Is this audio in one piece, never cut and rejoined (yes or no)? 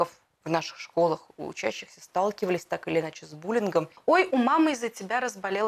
no